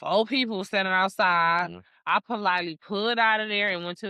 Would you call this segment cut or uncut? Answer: uncut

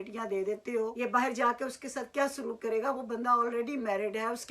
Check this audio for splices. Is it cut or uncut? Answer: cut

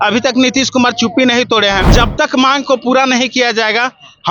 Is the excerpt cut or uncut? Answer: cut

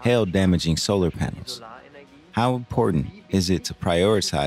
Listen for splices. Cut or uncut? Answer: uncut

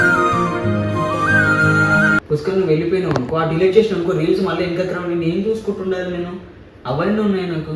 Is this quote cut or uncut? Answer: cut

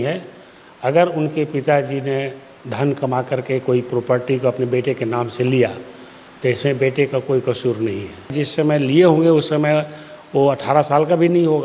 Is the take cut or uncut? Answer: cut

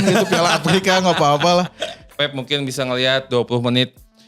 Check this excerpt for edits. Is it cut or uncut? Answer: cut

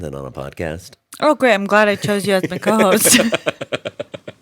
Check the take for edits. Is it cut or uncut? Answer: uncut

